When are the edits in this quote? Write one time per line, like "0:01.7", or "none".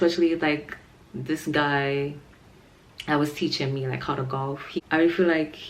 0:04.8